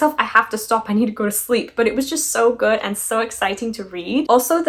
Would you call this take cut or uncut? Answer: uncut